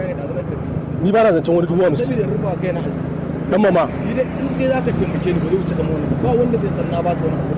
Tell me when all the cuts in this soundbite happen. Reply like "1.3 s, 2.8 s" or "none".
3.9 s

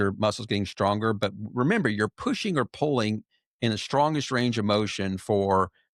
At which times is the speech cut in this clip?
none

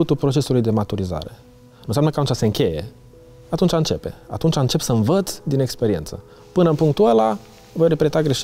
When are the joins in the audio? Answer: none

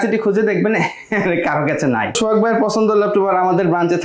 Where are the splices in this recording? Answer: 2.2 s

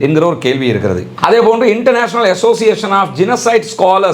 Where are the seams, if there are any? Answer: 1.1 s

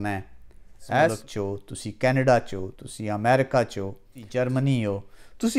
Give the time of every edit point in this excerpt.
1.2 s, 4.1 s

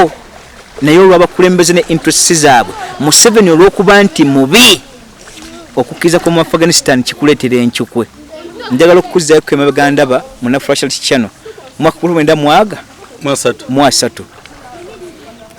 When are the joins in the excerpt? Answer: none

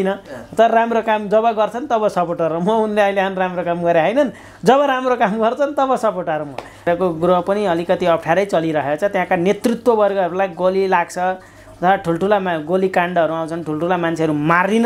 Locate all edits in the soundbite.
6.8 s

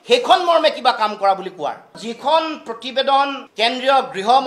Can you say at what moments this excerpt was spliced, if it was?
1.9 s

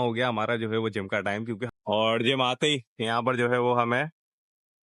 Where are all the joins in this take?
1.6 s

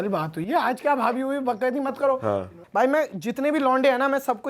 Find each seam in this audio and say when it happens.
2.5 s

